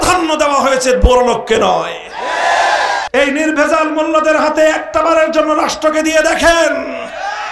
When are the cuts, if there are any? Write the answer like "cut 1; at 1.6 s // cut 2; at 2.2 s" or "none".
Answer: cut 1; at 3.1 s